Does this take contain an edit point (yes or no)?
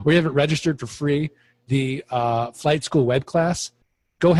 no